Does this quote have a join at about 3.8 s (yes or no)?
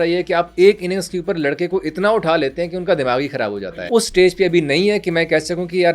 yes